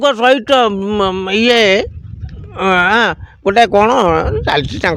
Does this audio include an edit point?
no; 0 cuts

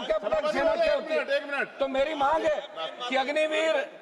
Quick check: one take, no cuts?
yes; 0 cuts

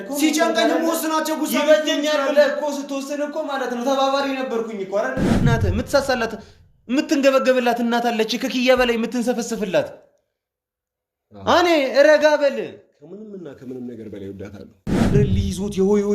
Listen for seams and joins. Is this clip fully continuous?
no; 2 cuts; at 5.3 s, 15.1 s

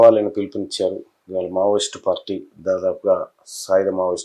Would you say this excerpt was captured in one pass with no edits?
yes; 0 cuts

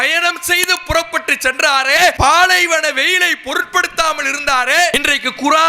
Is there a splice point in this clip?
yes; 2 cuts; at 2.2 s, 4.9 s

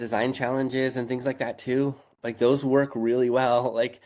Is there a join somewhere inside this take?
no; 0 cuts

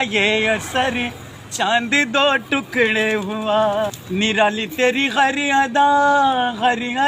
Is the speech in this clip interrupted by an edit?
yes; 1 cut; at 4.0 s

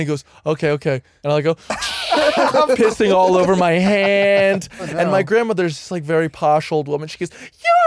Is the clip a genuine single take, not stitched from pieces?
no; 2 cuts; at 1.1 s, 4.9 s

